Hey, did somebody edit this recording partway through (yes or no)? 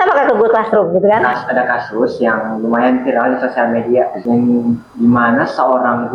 yes